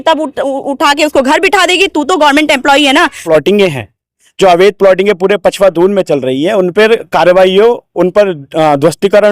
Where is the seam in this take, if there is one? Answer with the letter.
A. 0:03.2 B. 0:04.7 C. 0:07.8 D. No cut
A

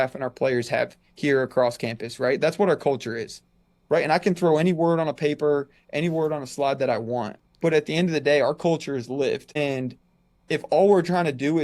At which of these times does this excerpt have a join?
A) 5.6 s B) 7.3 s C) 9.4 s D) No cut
B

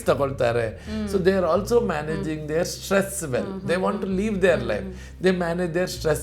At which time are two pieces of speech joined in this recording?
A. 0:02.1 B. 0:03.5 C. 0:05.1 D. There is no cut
D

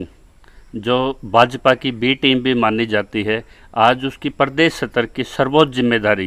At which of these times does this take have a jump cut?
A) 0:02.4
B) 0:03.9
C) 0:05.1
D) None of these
D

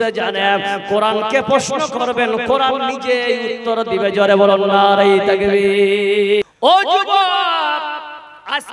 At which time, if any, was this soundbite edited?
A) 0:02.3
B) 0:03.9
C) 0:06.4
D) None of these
C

